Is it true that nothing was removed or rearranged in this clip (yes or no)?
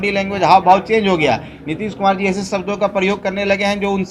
yes